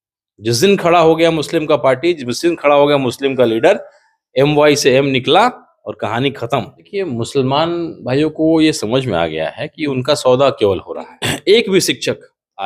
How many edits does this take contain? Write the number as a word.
two